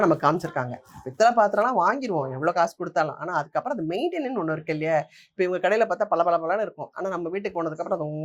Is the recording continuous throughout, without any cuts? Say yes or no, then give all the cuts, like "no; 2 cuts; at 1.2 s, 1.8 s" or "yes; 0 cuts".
yes; 0 cuts